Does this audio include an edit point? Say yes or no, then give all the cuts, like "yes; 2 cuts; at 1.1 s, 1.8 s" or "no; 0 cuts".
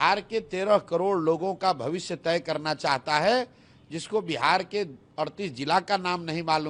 no; 0 cuts